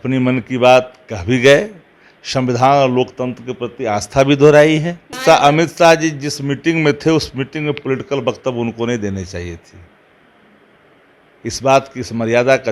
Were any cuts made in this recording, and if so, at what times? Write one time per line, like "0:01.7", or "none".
0:05.2